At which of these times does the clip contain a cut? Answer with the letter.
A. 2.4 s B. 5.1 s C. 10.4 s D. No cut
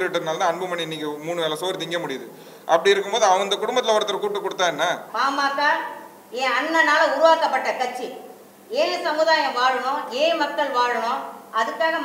B